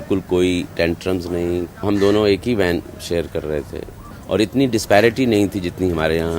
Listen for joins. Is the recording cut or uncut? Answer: cut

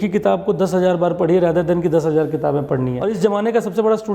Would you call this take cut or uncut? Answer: cut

